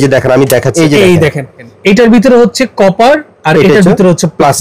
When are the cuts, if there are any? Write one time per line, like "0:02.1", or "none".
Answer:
0:00.7
0:01.7